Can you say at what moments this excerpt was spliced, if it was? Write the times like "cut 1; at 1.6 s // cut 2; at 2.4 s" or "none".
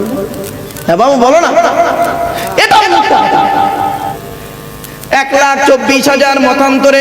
cut 1; at 3.9 s